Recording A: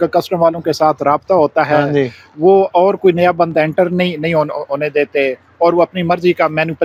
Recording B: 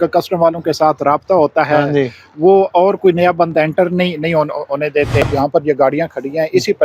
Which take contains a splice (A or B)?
B